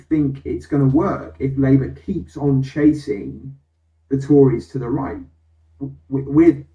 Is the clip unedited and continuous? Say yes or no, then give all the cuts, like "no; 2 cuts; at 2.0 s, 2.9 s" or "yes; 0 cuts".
yes; 0 cuts